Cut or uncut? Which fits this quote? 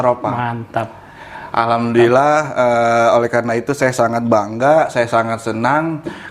uncut